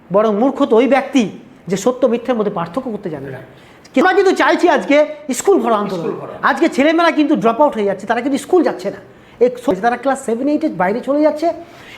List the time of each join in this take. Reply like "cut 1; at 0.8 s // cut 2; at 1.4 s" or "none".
cut 1; at 4.0 s // cut 2; at 9.7 s